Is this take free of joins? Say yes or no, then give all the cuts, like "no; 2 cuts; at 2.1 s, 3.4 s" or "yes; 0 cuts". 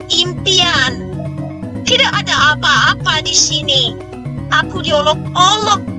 yes; 0 cuts